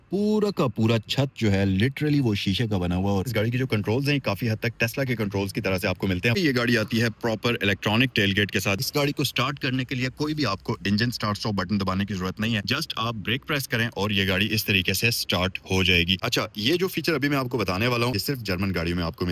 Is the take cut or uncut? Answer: cut